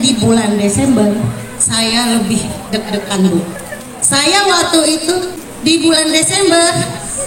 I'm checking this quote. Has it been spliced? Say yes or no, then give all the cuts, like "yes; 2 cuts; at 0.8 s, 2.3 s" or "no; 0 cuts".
no; 0 cuts